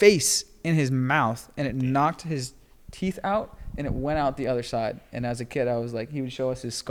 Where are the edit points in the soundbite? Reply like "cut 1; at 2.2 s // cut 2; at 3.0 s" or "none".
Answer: none